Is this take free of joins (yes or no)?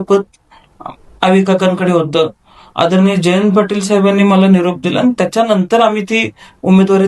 yes